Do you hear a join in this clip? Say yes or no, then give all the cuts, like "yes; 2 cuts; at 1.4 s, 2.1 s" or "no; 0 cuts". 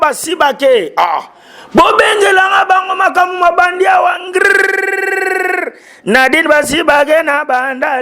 no; 0 cuts